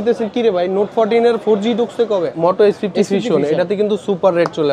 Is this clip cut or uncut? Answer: cut